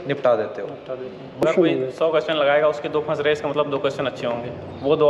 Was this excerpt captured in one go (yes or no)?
no